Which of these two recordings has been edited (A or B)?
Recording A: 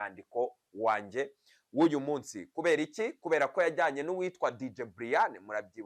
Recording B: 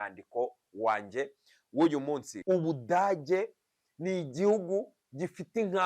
B